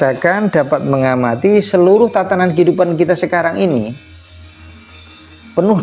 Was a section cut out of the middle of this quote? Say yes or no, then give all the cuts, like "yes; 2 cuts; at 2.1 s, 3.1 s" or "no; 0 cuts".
no; 0 cuts